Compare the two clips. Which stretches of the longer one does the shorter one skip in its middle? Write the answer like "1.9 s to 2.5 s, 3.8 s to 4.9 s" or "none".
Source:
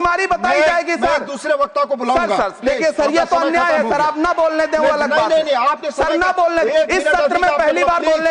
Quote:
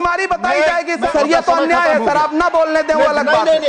1.1 s to 2.9 s